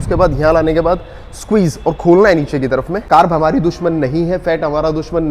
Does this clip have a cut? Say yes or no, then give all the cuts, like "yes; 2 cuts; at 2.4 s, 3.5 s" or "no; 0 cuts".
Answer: yes; 1 cut; at 3.1 s